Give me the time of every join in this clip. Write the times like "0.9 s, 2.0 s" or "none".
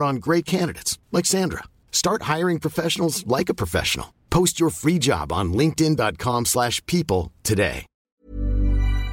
7.9 s